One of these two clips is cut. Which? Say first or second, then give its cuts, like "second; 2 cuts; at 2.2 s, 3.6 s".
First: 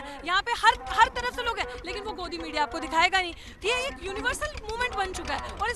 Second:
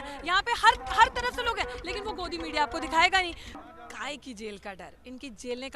second; 1 cut; at 3.6 s